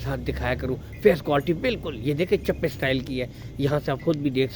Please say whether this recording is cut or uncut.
uncut